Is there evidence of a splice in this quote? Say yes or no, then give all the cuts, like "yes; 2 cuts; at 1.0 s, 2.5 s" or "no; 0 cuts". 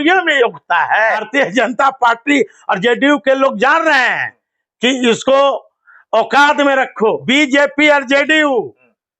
yes; 2 cuts; at 1.2 s, 7.2 s